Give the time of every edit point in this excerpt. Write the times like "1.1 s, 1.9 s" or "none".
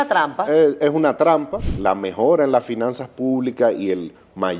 1.7 s